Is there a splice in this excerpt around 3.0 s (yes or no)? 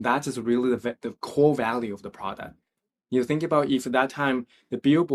no